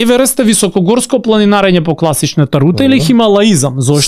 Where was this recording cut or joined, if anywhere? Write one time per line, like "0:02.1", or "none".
none